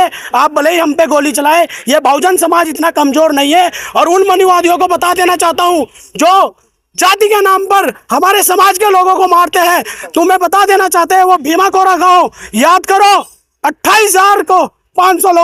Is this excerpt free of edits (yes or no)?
yes